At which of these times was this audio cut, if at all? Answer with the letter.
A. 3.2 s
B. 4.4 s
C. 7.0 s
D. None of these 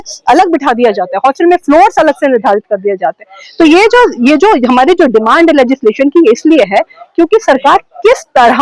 D